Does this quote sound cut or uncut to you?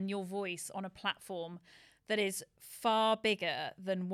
uncut